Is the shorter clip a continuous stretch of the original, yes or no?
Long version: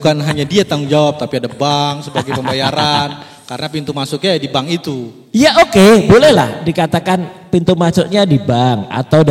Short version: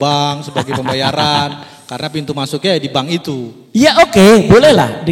yes